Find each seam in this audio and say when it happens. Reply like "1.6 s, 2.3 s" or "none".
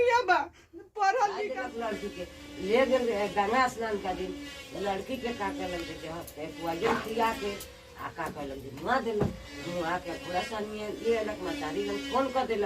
1.7 s